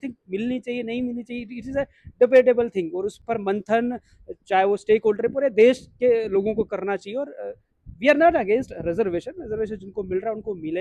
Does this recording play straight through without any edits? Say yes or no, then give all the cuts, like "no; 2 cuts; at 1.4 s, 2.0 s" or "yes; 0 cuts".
yes; 0 cuts